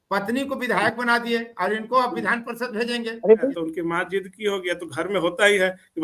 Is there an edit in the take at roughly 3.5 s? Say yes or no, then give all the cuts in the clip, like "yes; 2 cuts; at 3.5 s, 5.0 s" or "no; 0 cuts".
yes; 1 cut; at 3.5 s